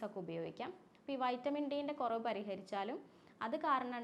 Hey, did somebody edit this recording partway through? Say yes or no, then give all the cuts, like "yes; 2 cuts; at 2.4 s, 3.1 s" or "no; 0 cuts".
no; 0 cuts